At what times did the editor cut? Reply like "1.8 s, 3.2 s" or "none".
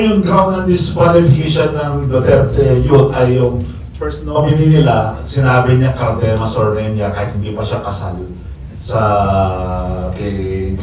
none

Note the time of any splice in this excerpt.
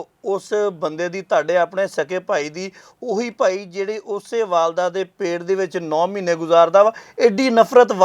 none

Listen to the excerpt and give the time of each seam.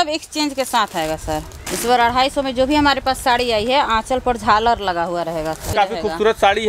1.6 s, 5.7 s

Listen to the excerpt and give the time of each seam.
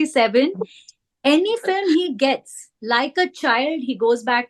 none

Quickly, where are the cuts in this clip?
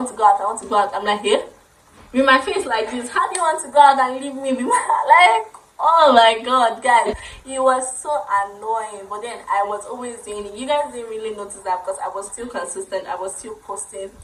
none

